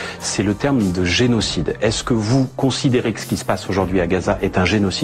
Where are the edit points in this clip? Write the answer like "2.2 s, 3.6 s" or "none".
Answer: 1.3 s